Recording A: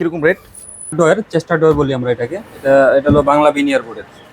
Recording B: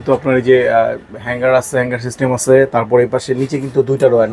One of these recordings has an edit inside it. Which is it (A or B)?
A